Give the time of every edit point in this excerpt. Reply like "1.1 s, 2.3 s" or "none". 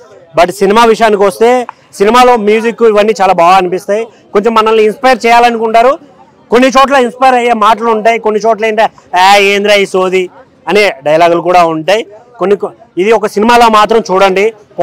none